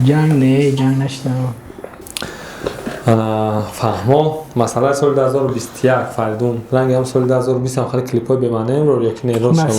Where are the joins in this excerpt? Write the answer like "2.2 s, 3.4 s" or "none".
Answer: none